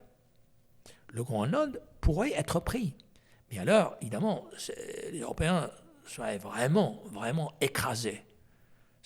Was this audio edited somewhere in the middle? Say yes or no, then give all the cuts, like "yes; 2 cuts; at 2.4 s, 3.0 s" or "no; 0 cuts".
no; 0 cuts